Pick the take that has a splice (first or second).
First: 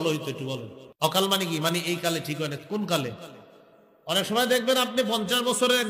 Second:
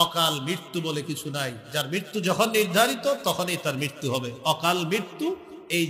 first